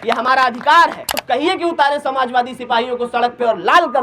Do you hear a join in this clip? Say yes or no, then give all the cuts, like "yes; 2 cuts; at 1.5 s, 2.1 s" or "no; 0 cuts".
yes; 1 cut; at 1.1 s